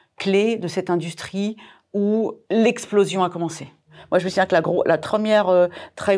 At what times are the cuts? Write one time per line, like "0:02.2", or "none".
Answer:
0:02.4
0:03.9
0:05.0